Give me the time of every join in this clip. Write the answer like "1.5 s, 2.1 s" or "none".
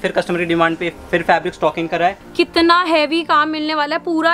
2.2 s